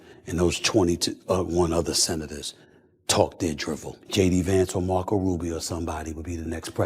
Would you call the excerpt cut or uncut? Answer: cut